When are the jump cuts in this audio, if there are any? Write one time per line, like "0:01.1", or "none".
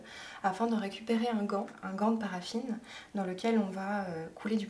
0:01.8